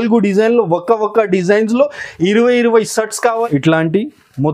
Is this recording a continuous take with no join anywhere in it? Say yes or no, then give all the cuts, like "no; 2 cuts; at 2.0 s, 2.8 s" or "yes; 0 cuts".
no; 1 cut; at 3.2 s